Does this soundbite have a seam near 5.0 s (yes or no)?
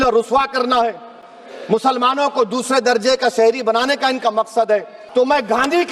yes